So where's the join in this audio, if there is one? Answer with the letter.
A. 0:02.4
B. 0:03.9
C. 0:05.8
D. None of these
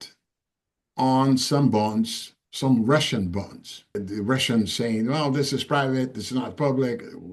B